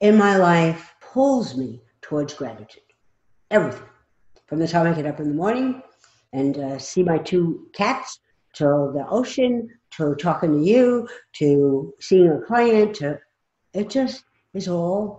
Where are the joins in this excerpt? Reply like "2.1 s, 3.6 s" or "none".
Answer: 0.9 s